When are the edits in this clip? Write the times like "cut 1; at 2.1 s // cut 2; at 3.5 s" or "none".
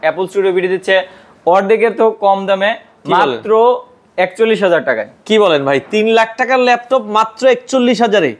none

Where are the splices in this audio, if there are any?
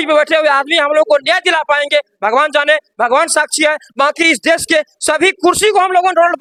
none

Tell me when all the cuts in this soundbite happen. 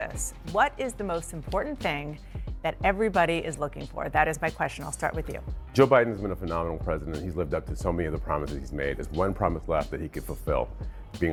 none

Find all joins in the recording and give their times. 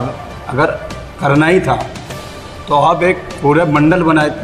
none

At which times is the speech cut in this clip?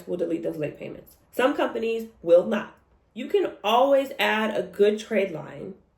cut 1; at 2.8 s

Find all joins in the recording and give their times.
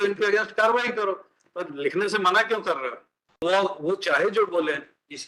cut 1; at 3.4 s

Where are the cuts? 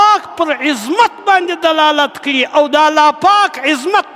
none

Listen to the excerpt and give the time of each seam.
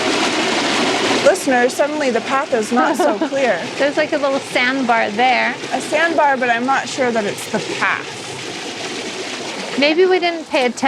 cut 1; at 1.1 s

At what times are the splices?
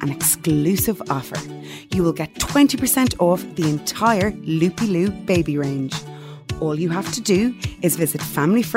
none

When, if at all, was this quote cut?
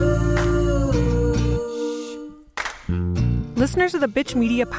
cut 1; at 3.5 s

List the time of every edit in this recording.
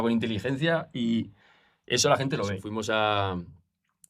cut 1; at 2.6 s

